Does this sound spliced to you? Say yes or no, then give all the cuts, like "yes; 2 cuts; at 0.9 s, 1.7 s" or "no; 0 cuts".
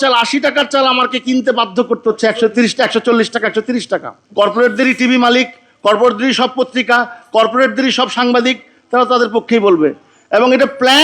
yes; 1 cut; at 4.2 s